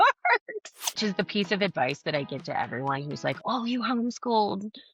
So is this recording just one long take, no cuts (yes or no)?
no